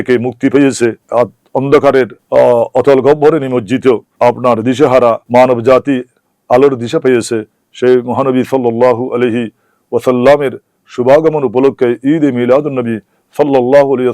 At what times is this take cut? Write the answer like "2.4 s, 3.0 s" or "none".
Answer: 1.0 s, 2.2 s, 4.1 s, 5.2 s